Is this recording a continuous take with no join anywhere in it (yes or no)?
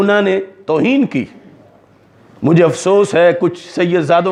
yes